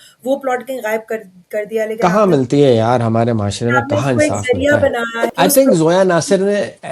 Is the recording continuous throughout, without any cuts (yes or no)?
no